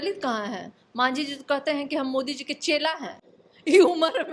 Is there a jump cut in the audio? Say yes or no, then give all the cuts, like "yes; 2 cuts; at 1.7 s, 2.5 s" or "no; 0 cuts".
no; 0 cuts